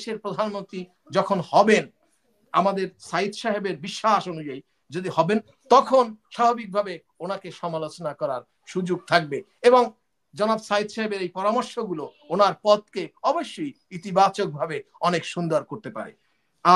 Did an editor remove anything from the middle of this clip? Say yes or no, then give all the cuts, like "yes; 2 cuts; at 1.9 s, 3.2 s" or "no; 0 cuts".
no; 0 cuts